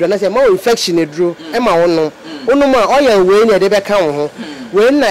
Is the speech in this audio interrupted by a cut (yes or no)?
no